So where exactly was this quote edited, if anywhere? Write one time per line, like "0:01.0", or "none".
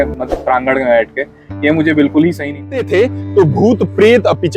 0:02.6